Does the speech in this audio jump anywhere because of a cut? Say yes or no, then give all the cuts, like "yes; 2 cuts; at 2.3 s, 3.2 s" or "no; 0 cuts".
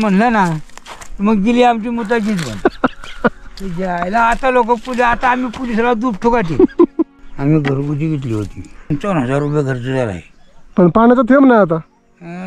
yes; 2 cuts; at 7.0 s, 8.9 s